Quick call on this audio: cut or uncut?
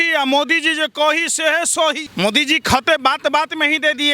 cut